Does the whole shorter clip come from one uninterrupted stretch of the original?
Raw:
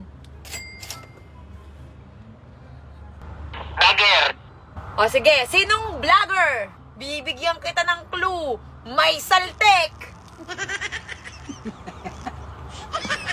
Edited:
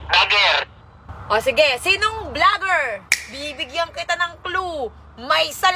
yes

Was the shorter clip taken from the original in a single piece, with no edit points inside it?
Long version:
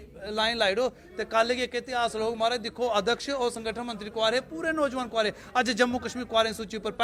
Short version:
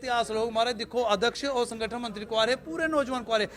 yes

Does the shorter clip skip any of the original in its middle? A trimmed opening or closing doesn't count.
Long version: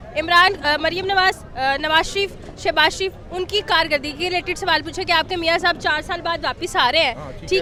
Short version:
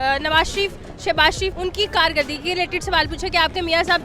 yes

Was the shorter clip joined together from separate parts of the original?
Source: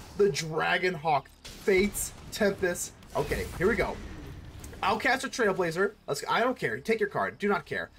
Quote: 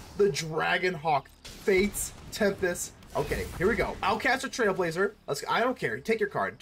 yes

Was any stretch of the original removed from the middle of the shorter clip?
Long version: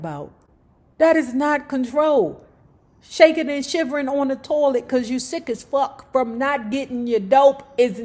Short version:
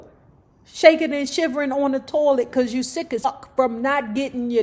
yes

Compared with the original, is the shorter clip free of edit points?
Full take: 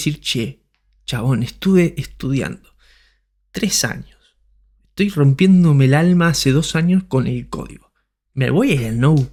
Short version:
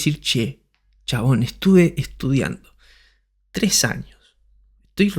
yes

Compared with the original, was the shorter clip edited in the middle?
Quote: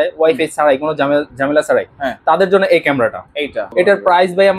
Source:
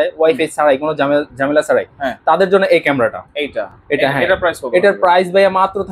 yes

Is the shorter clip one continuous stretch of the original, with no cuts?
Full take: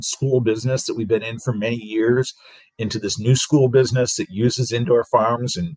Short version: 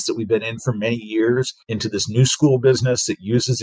no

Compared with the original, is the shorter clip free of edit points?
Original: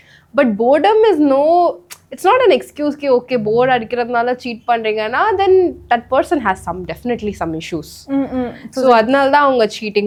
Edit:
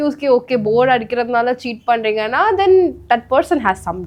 yes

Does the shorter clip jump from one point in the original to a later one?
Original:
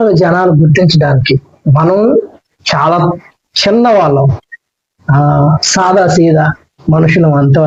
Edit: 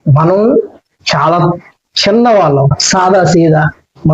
yes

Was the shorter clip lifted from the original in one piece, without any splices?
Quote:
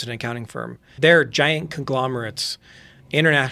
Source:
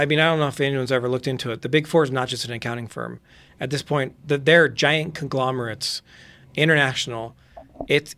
no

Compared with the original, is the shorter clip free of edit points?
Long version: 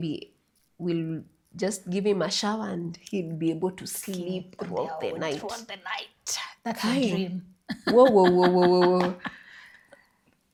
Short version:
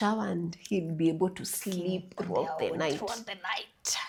yes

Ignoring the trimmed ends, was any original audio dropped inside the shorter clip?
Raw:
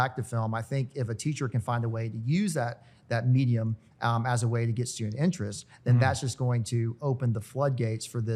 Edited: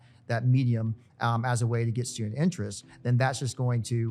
no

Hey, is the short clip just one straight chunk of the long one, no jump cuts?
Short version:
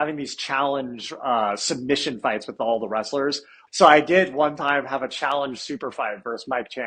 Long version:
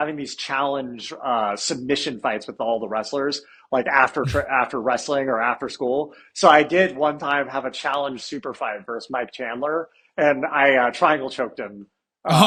no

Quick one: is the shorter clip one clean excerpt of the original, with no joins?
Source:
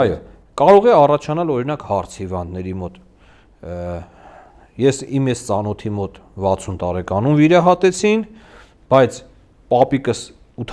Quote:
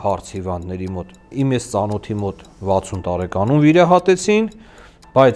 no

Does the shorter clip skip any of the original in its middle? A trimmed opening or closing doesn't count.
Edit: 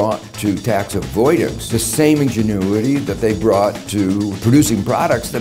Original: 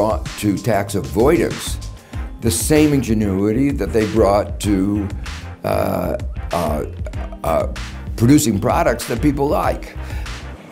yes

